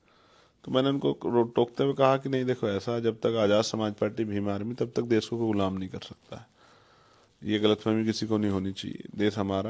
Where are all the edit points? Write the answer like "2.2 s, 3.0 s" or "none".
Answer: none